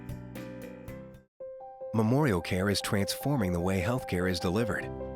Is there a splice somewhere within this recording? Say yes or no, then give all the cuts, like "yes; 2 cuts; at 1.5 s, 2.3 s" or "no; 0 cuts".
yes; 1 cut; at 1.2 s